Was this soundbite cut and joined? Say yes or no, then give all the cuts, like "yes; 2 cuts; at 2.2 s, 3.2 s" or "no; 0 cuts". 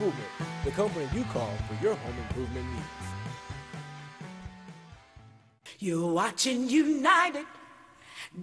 yes; 1 cut; at 5.7 s